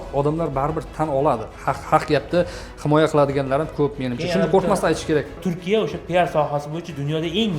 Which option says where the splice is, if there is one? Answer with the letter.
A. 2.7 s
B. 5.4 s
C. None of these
B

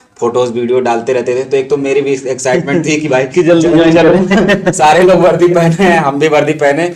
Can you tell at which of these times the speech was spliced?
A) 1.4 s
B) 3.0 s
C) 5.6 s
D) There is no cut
D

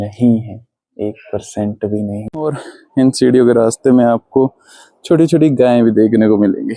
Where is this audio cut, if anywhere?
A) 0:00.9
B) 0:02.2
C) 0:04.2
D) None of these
B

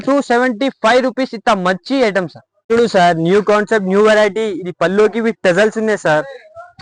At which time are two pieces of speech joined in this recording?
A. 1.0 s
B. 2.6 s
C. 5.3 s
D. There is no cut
D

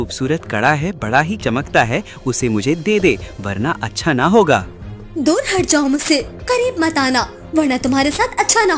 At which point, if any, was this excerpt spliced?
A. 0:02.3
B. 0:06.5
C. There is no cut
C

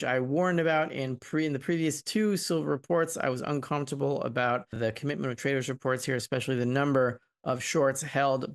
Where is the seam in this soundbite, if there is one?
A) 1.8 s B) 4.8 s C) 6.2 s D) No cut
B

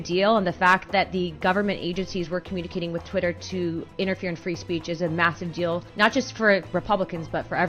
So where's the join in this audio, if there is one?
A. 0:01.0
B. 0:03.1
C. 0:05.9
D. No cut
C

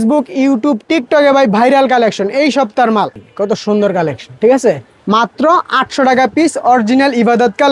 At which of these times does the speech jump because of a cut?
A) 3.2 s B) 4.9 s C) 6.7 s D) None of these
A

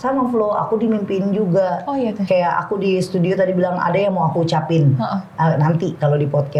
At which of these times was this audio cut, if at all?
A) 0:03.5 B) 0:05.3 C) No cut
C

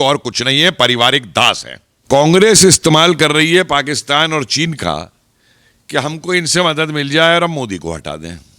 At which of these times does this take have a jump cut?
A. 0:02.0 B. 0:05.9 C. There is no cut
A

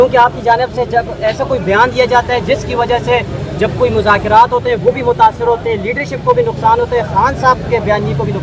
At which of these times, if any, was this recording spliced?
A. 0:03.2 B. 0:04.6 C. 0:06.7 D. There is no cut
D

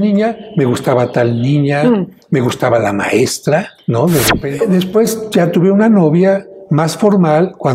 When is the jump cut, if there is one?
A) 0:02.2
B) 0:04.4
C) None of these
B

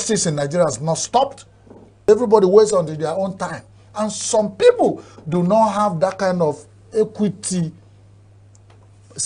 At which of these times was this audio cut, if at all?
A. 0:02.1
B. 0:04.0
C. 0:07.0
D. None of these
A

